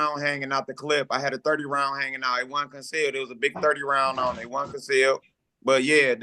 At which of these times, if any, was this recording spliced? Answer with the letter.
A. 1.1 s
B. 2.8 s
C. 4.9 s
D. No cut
D